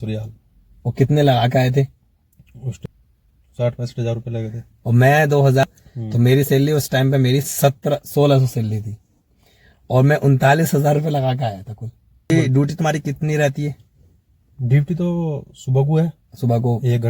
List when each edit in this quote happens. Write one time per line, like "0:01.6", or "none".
0:02.8
0:05.6
0:12.3